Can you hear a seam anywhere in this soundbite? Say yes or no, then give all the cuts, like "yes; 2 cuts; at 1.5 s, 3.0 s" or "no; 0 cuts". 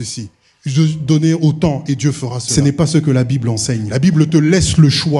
yes; 2 cuts; at 2.5 s, 3.9 s